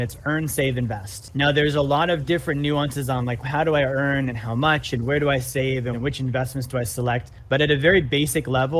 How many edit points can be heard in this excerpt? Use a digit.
4